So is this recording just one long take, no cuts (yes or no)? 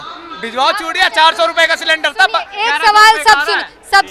yes